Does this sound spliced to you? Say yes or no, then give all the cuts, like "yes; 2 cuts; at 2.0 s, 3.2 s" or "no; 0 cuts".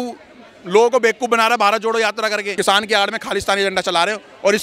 yes; 1 cut; at 2.5 s